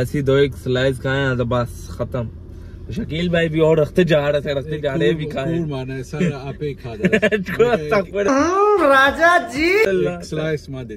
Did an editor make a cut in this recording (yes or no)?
no